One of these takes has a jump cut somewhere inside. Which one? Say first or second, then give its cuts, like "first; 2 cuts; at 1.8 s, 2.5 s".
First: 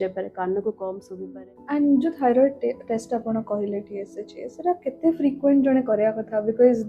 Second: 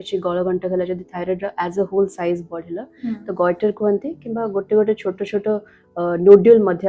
first; 1 cut; at 1.1 s